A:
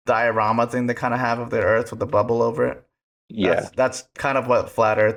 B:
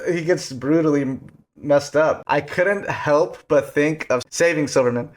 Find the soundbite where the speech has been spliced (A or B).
B